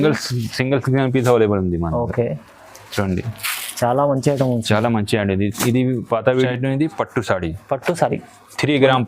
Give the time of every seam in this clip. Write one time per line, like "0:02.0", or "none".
0:06.5